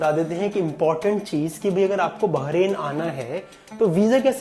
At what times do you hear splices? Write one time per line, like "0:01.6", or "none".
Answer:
none